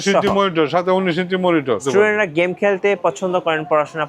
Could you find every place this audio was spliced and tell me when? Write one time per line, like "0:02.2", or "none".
0:01.8